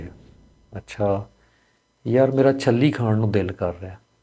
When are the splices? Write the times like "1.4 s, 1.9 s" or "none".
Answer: none